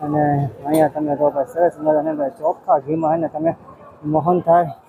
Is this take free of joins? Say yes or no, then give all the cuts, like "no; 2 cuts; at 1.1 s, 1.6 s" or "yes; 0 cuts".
yes; 0 cuts